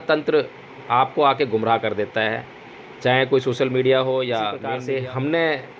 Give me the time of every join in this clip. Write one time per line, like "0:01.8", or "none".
0:04.7